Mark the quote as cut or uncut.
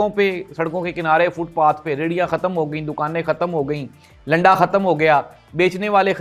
uncut